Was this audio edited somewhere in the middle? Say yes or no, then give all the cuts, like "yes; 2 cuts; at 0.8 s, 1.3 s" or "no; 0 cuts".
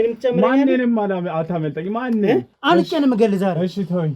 yes; 1 cut; at 2.5 s